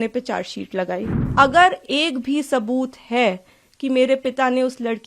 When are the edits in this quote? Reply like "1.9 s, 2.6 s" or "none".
1.2 s